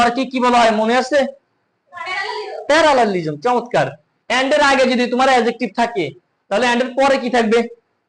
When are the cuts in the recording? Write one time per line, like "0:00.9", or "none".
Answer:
none